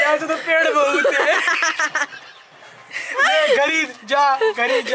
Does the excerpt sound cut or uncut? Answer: uncut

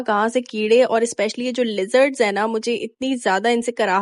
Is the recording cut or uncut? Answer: uncut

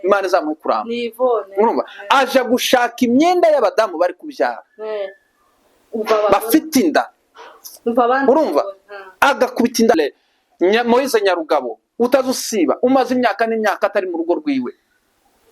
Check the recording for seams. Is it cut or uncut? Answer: cut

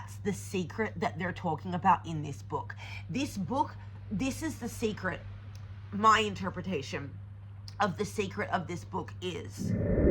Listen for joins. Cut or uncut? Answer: uncut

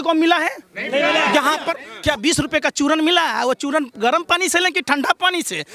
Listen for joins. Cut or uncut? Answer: cut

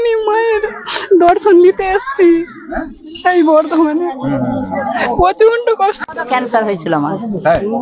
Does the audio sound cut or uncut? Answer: cut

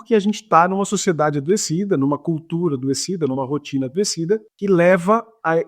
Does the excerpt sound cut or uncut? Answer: cut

